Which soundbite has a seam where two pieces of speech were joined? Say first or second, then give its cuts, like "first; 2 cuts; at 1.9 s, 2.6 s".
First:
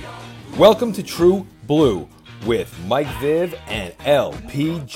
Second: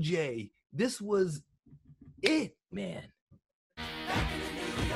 second; 1 cut; at 3.8 s